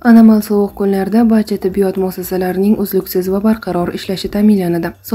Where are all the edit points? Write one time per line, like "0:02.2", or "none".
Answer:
none